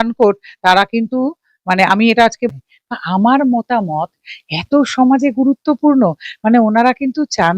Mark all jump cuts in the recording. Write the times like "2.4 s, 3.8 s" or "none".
2.5 s